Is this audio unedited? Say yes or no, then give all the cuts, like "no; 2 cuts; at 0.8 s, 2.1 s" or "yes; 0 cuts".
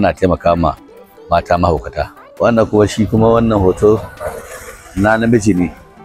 no; 1 cut; at 2.2 s